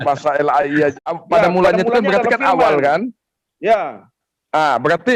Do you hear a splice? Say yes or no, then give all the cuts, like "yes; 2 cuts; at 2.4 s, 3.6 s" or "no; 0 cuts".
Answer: yes; 1 cut; at 0.9 s